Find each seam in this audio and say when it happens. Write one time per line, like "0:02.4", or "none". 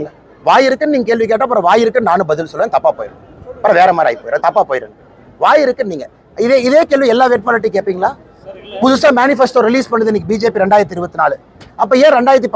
none